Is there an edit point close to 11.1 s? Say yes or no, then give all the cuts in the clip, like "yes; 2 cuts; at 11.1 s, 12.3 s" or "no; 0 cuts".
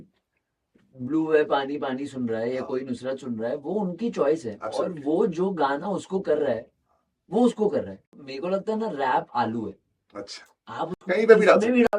no; 1 cut; at 8.3 s